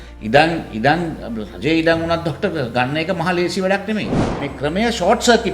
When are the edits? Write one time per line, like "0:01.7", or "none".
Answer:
0:04.3